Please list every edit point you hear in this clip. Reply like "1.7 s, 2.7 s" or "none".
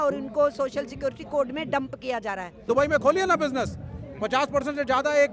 2.7 s